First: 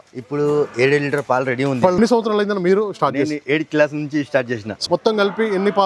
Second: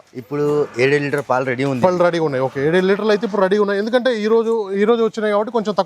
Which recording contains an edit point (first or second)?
first